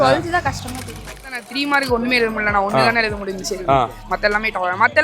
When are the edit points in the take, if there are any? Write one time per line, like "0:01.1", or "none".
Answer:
0:01.1